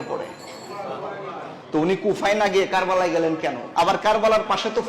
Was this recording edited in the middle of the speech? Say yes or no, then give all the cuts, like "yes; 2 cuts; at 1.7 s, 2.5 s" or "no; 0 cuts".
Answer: yes; 1 cut; at 3.6 s